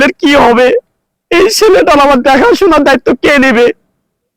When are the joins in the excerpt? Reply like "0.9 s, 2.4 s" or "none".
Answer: none